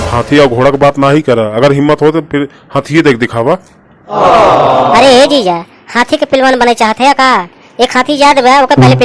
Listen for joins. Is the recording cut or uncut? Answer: uncut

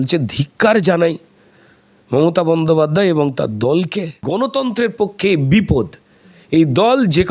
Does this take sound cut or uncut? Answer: cut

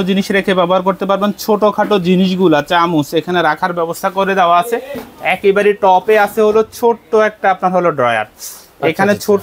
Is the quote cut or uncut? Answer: uncut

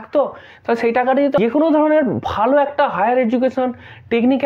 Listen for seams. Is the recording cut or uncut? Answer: cut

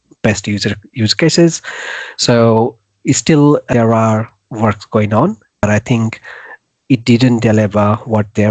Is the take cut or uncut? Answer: cut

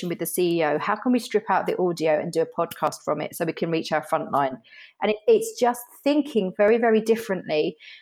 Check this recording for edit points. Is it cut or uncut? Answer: uncut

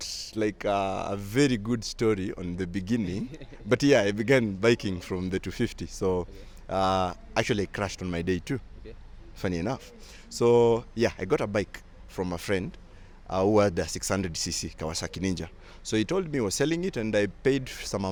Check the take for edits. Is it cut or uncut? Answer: uncut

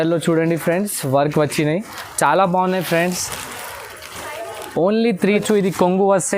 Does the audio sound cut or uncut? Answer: cut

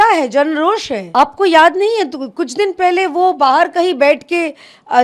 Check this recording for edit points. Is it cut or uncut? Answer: cut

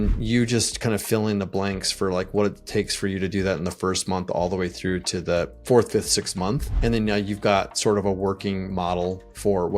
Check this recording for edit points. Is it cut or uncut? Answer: cut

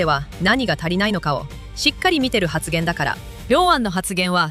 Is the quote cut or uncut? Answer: uncut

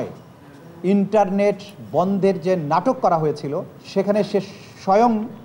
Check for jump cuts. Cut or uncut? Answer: cut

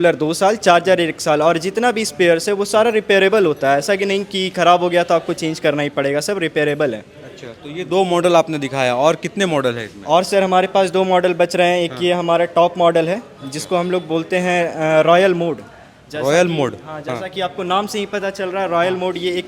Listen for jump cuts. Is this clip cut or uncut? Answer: uncut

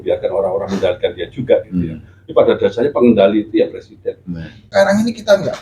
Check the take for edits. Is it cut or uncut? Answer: cut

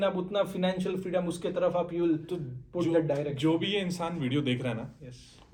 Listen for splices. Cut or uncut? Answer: uncut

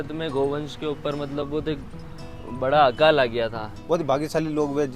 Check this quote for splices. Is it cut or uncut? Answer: cut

